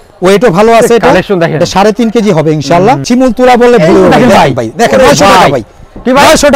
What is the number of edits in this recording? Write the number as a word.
one